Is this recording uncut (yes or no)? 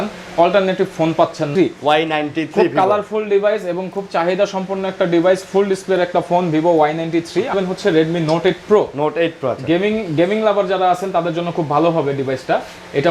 no